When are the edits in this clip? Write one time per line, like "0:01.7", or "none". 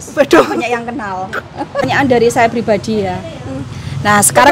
0:01.8